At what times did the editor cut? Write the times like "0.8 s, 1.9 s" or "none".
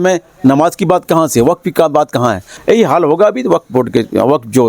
2.5 s